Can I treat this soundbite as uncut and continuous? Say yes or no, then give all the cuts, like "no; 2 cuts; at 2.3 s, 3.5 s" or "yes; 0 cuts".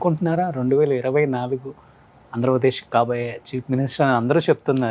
yes; 0 cuts